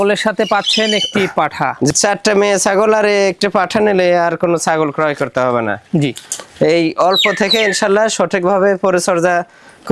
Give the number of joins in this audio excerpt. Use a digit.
1